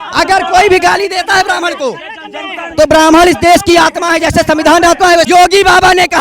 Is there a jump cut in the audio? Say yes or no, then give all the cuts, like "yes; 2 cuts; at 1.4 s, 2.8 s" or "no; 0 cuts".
yes; 1 cut; at 5.3 s